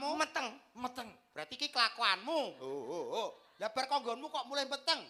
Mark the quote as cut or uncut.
uncut